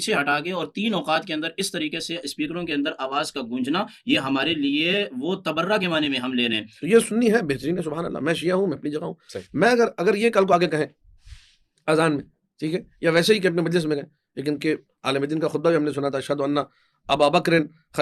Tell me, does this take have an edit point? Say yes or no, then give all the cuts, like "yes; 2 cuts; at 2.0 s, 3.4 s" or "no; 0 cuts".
yes; 1 cut; at 6.7 s